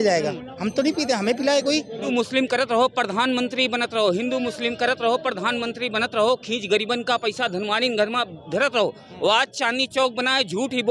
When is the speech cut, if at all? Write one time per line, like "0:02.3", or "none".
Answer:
0:02.1